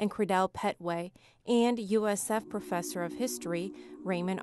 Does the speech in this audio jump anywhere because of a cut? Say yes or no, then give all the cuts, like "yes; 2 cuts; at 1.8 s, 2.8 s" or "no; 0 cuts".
yes; 1 cut; at 2.2 s